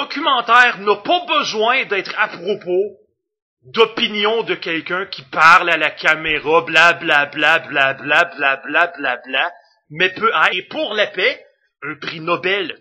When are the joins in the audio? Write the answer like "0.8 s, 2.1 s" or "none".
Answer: none